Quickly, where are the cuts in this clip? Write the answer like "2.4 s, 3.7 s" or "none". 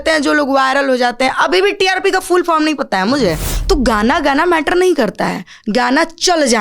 3.5 s

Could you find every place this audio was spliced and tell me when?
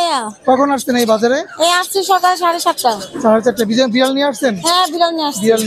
none

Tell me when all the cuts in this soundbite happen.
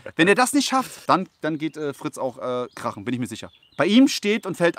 1.0 s

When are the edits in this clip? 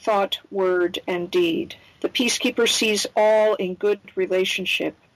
4.1 s

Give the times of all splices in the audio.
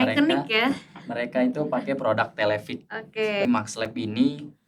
3.5 s

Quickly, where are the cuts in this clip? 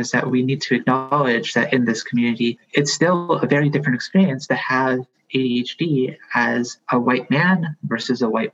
2.6 s, 6.8 s

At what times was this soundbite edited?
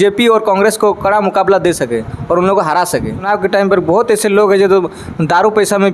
3.3 s

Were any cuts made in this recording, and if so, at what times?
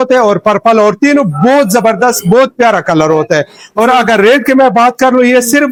none

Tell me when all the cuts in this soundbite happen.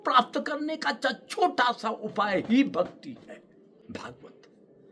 3.7 s

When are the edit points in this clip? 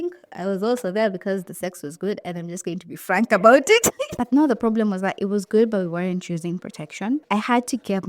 4.2 s, 7.3 s

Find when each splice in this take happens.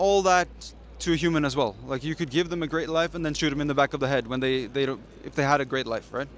none

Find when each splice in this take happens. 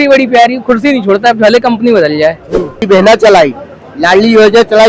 2.8 s

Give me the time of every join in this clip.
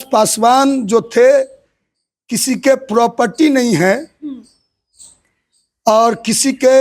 none

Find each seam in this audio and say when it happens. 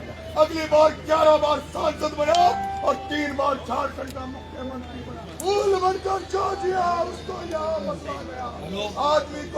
5.3 s

